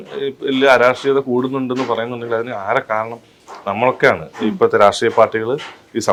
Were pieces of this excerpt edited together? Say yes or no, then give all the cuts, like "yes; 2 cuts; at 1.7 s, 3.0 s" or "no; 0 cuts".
no; 0 cuts